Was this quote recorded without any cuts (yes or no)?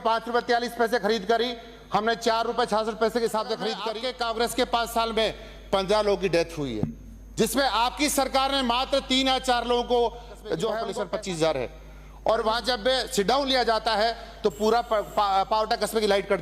no